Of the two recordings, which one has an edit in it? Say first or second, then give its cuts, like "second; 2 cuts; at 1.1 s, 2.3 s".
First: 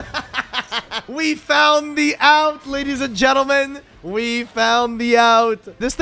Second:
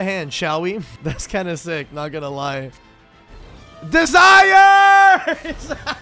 second; 1 cut; at 1.0 s